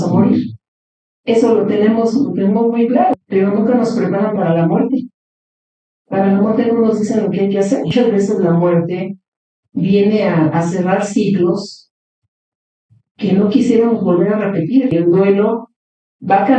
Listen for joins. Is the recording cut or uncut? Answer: cut